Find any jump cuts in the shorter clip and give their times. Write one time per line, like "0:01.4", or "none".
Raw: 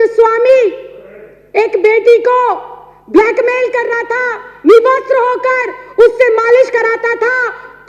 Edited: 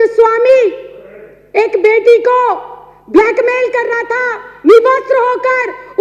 none

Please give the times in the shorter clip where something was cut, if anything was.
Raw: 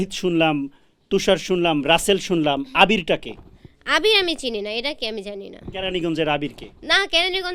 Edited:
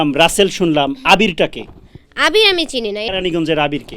0:03.1

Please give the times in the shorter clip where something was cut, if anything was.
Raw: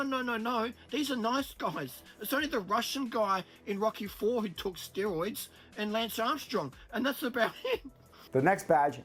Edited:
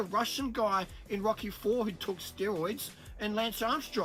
none

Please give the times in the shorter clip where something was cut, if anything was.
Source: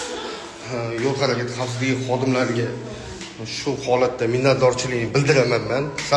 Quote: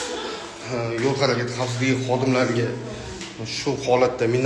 none

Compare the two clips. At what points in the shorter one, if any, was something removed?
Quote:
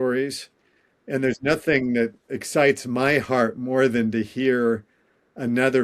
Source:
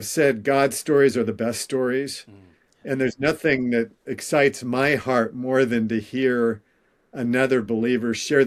none

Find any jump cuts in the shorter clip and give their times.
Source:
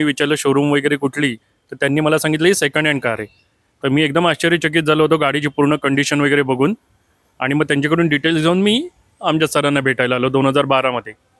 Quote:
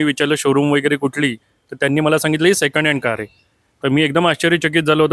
none

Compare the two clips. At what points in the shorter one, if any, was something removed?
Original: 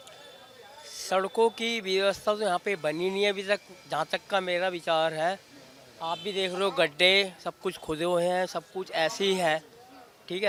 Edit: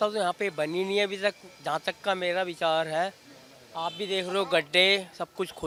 none

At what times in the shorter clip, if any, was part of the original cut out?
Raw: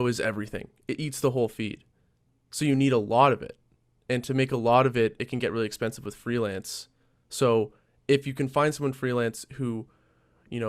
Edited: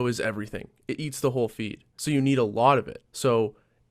0:01.8
0:03.0

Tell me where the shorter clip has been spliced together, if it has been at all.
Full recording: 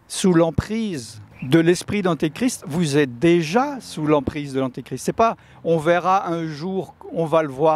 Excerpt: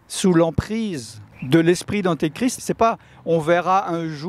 0:02.6

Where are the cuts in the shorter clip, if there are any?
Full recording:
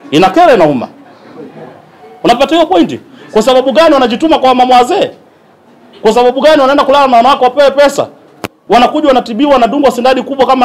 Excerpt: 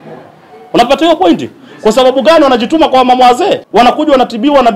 0:03.6

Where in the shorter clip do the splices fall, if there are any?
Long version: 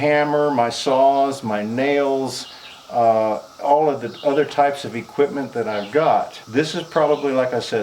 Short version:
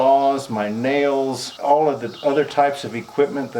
0:01.5

